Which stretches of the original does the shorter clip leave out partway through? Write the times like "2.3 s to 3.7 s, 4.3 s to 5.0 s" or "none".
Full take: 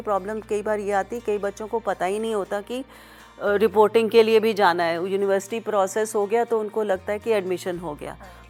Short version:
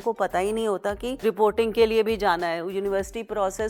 2.9 s to 3.6 s